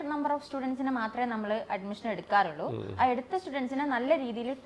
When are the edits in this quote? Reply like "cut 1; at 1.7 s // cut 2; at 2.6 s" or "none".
none